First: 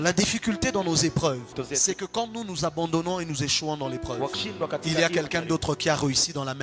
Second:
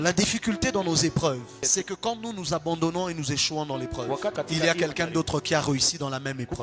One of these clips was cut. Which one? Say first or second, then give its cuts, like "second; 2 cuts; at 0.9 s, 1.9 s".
second; 2 cuts; at 1.5 s, 4.3 s